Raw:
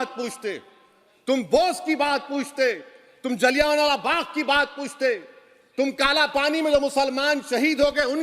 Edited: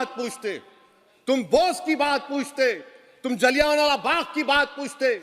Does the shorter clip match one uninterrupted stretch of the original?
yes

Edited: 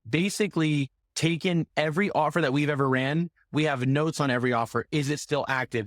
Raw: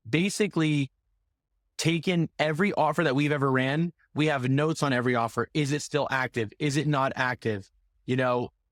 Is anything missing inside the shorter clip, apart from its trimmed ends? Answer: yes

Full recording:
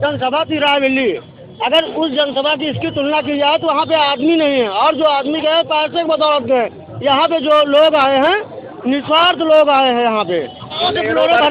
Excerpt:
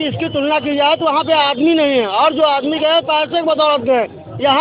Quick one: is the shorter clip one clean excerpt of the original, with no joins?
yes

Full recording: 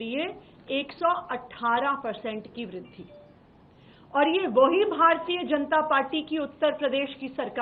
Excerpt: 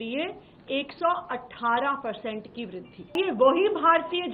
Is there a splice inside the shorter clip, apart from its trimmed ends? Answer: yes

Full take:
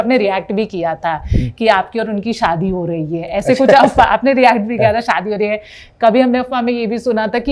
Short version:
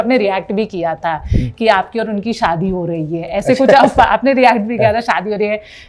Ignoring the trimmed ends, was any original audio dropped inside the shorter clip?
no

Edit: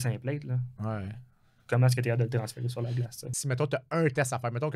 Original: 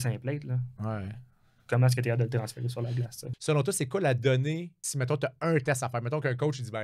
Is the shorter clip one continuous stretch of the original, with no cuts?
no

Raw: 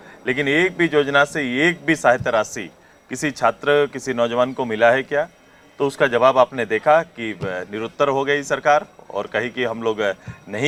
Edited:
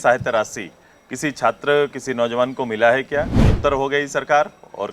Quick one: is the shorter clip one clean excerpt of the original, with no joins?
no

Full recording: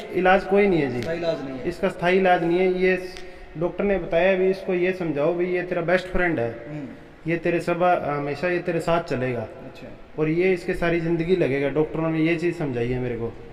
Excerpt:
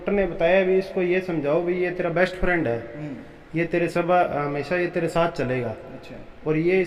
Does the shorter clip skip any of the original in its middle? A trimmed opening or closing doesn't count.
no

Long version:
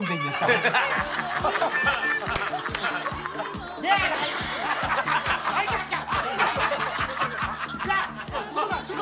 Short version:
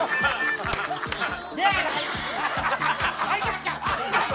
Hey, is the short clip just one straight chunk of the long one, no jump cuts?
no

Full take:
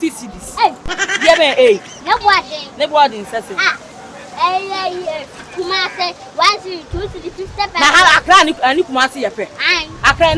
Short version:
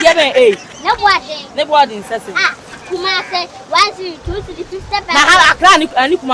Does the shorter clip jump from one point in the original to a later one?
yes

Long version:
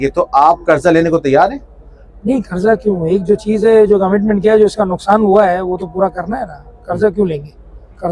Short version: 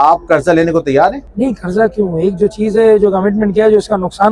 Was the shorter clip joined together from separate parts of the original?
yes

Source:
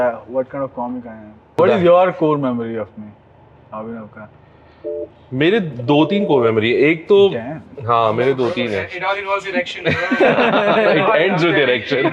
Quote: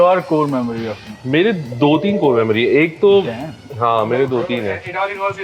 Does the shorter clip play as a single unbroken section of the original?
no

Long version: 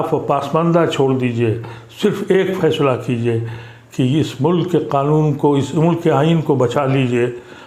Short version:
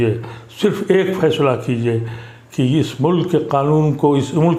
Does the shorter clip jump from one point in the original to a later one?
no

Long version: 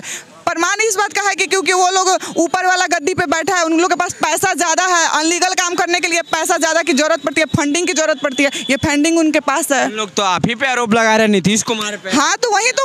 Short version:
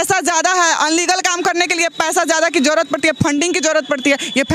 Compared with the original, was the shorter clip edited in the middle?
no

